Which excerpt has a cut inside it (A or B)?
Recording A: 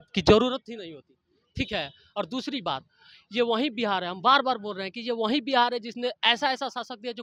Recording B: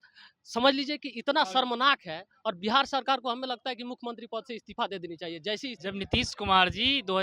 B